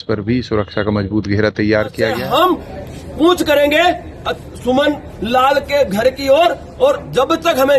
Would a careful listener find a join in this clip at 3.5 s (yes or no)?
no